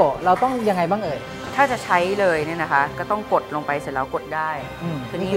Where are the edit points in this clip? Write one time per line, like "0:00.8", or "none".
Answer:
none